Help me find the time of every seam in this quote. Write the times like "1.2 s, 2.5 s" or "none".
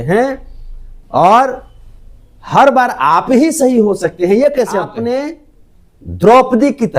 5.0 s